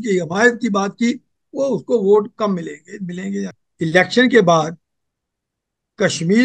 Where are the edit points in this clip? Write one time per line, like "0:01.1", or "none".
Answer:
0:03.6